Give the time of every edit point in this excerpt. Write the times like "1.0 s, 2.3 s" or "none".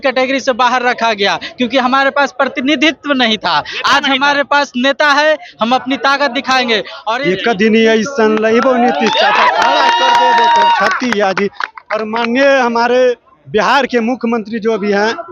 7.1 s